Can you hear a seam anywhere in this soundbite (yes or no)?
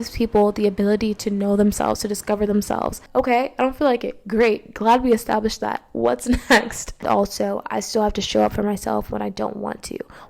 yes